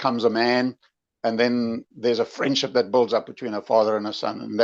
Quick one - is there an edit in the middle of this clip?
no; 0 cuts

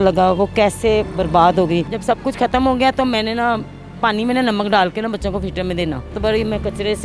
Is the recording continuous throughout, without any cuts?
no; 2 cuts; at 1.9 s, 6.1 s

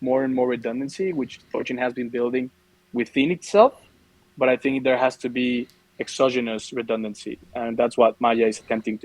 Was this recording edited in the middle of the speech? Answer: no; 0 cuts

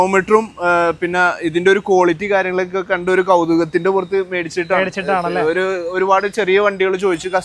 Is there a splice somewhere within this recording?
no; 0 cuts

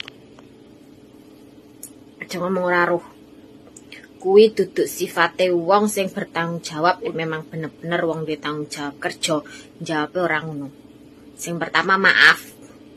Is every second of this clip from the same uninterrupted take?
no; 1 cut; at 7.1 s

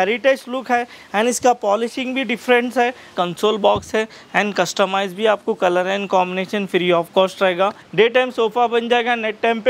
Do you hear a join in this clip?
yes; 2 cuts; at 3.1 s, 7.8 s

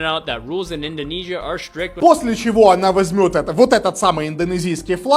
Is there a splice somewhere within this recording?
yes; 1 cut; at 2.0 s

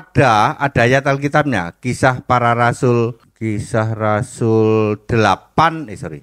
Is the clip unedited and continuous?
no; 1 cut; at 3.3 s

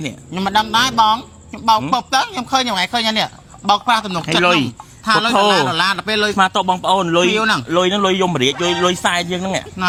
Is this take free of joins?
yes; 0 cuts

